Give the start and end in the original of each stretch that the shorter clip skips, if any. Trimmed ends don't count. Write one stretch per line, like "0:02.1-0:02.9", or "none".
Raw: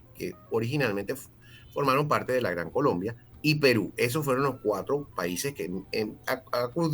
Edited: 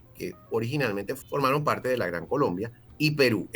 0:01.2-0:01.7